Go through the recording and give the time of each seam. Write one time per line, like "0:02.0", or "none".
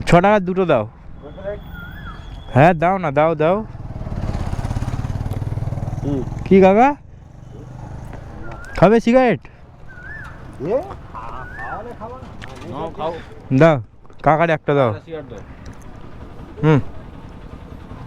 none